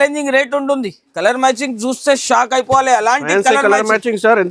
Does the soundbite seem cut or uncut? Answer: cut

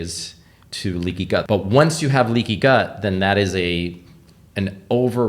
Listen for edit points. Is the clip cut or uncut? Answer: cut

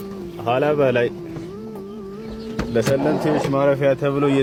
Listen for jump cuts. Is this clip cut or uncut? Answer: uncut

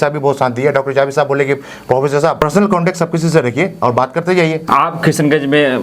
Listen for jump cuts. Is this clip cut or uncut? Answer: cut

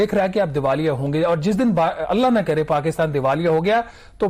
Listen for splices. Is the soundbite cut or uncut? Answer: uncut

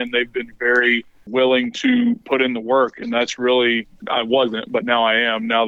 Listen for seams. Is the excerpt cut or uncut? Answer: cut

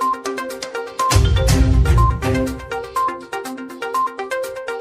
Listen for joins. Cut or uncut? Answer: uncut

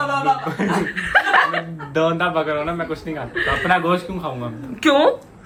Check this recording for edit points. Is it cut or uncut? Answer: uncut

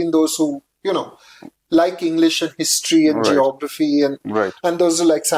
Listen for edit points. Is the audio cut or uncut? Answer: uncut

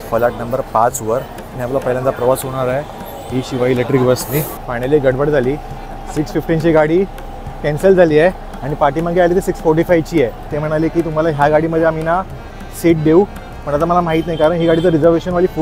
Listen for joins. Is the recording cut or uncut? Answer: cut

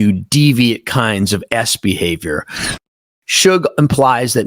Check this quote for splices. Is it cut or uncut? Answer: cut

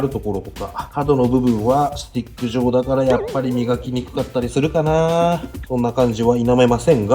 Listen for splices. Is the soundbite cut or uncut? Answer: uncut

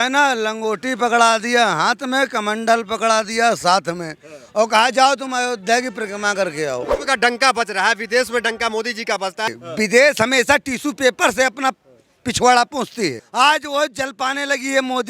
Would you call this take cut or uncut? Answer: cut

